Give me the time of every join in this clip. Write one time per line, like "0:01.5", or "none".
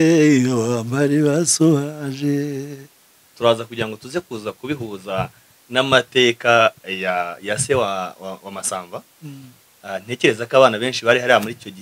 0:03.3